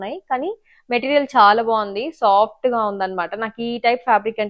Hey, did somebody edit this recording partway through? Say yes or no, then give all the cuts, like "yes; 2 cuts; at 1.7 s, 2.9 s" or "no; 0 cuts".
no; 0 cuts